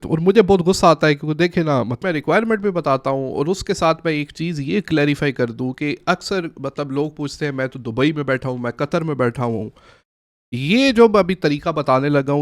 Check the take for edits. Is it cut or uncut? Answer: cut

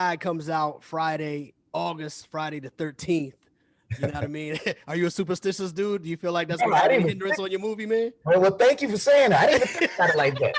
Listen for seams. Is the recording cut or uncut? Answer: uncut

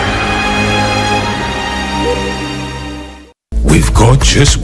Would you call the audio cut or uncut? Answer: cut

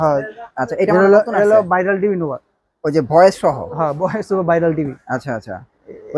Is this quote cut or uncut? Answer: uncut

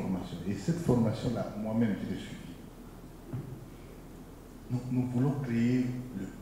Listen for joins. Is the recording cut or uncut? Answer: uncut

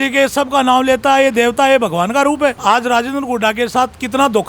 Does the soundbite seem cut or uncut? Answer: cut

